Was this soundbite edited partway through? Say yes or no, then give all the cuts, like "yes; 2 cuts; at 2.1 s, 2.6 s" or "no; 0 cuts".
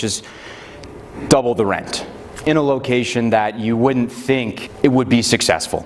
yes; 2 cuts; at 2.4 s, 4.6 s